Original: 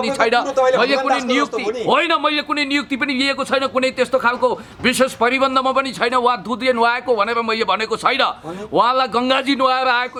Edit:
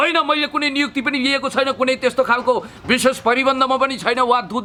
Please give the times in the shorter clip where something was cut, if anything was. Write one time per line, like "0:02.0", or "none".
none